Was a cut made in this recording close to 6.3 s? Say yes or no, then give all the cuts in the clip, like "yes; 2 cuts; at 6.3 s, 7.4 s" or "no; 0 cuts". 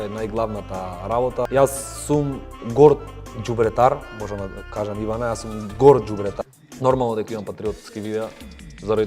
yes; 2 cuts; at 1.5 s, 6.3 s